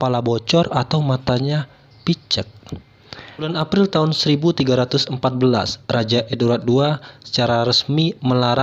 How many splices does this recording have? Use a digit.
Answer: 1